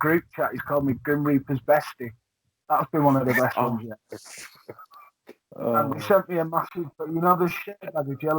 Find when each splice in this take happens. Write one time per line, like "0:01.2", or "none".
0:05.4